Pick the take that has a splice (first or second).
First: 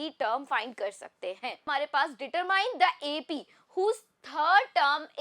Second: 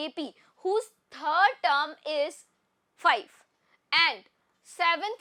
first